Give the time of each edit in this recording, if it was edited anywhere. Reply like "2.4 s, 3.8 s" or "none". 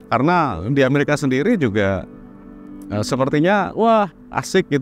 none